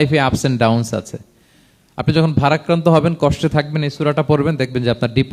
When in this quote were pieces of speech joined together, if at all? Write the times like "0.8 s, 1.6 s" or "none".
none